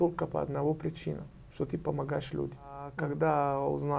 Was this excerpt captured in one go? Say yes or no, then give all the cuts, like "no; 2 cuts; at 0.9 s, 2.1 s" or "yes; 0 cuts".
no; 1 cut; at 2.9 s